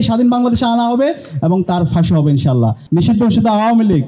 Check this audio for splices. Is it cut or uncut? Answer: cut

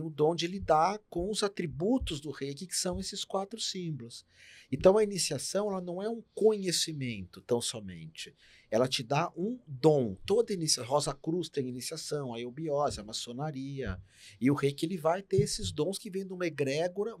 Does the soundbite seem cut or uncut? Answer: uncut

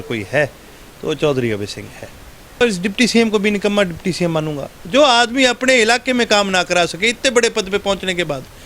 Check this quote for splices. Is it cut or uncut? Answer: cut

